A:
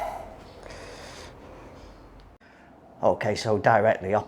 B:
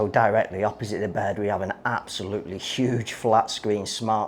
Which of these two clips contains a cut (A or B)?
A